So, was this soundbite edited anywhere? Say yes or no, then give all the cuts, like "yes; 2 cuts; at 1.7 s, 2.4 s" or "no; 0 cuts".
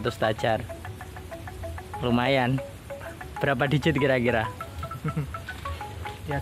no; 0 cuts